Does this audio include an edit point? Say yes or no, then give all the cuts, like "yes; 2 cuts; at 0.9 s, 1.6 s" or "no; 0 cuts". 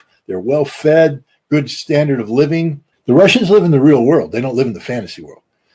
yes; 1 cut; at 2.9 s